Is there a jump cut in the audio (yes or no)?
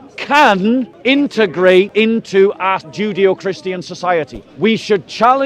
yes